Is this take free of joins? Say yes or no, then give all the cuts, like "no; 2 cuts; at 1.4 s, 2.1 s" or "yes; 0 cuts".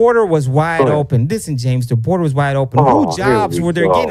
yes; 0 cuts